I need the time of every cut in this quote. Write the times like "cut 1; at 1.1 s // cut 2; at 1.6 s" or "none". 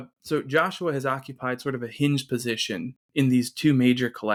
none